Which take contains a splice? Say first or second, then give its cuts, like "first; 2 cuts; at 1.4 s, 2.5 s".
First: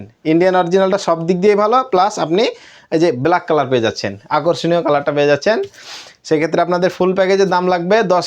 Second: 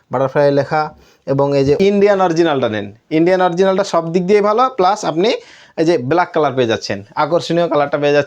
second; 1 cut; at 1.8 s